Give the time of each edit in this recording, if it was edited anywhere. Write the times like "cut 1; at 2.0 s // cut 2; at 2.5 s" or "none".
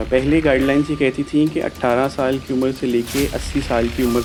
none